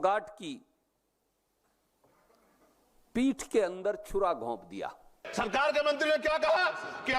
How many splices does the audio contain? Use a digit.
1